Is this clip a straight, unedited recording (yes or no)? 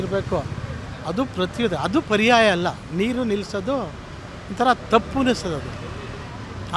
yes